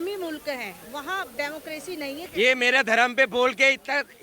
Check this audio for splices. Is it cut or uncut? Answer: cut